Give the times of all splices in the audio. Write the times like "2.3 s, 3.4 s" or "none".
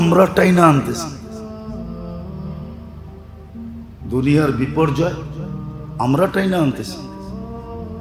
1.2 s, 4.0 s, 6.9 s